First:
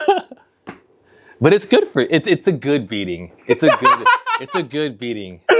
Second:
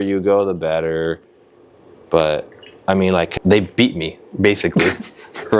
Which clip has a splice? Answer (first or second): second